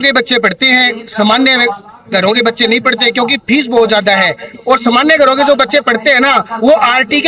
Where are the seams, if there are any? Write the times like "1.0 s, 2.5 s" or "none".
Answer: none